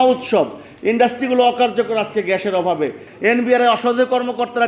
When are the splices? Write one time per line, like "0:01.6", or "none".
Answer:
0:03.0